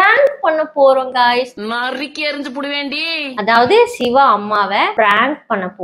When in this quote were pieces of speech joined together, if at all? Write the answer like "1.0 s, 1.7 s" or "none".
4.9 s